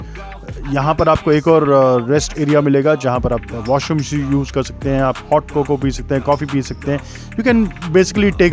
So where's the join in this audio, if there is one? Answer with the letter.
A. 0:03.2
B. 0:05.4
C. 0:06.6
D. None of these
D